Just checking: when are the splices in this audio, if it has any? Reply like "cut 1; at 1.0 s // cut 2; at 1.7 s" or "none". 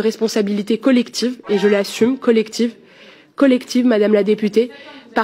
none